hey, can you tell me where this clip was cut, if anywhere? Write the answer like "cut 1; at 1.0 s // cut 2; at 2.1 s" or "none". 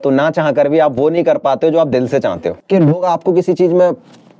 cut 1; at 2.5 s